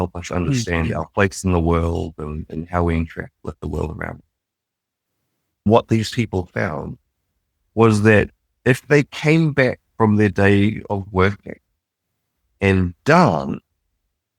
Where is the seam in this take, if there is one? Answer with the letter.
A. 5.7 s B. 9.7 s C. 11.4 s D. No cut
A